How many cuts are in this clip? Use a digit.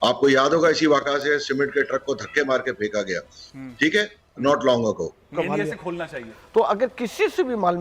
1